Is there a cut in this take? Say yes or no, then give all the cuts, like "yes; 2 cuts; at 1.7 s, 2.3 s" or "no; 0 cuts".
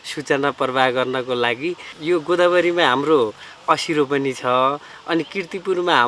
yes; 1 cut; at 1.9 s